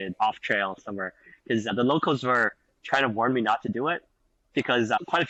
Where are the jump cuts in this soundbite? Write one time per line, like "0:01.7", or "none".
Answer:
none